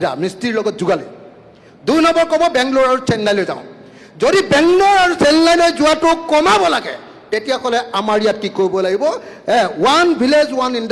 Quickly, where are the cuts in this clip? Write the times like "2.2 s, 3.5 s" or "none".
none